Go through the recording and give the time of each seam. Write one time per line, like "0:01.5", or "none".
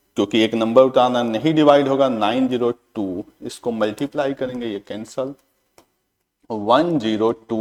none